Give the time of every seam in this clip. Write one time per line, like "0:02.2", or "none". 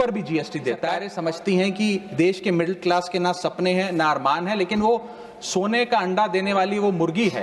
0:01.1